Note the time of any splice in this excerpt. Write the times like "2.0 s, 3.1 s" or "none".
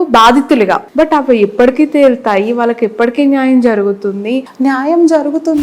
0.9 s, 4.4 s